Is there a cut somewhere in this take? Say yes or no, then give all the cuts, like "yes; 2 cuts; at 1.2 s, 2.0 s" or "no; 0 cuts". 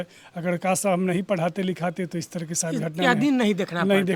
no; 0 cuts